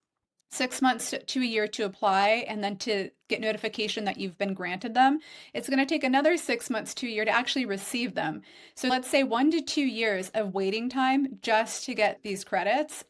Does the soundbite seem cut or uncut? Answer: cut